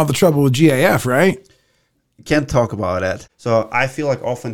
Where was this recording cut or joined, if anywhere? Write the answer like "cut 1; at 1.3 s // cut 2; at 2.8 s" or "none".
cut 1; at 3.3 s